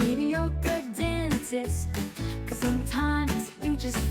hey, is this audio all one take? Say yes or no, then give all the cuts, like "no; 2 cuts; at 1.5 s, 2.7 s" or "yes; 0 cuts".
yes; 0 cuts